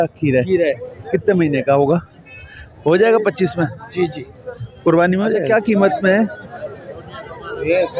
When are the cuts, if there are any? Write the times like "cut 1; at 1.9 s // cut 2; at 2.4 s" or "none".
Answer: cut 1; at 5.4 s